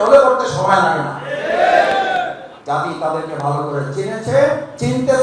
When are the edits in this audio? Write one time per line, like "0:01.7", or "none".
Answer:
0:02.5